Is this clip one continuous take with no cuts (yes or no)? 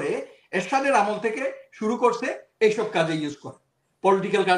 yes